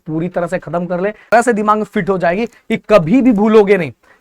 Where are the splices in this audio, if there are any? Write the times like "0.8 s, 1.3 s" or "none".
1.3 s